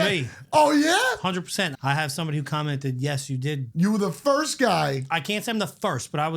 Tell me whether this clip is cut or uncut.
cut